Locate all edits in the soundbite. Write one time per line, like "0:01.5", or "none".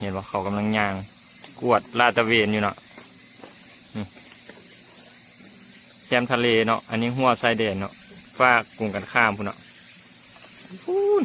none